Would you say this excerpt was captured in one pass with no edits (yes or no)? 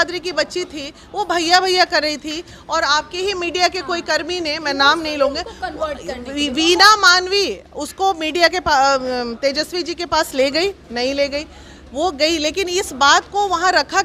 yes